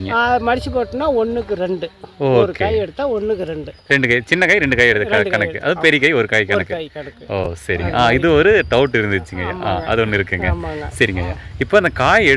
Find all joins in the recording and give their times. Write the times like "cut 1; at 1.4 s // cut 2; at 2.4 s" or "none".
none